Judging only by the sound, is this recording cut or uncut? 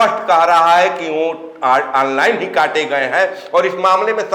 uncut